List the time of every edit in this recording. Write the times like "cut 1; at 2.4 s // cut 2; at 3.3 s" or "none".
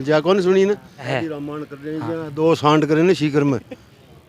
cut 1; at 1.1 s